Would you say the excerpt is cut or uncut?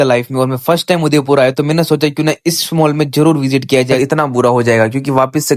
cut